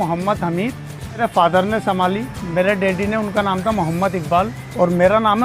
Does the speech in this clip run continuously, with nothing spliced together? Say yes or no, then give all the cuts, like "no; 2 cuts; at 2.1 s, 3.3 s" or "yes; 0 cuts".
no; 1 cut; at 1.2 s